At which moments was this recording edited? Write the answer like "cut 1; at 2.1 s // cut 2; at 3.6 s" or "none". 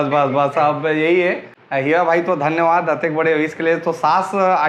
none